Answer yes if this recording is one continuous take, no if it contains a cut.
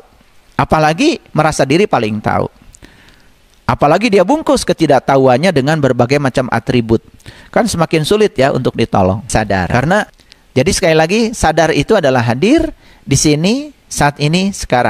no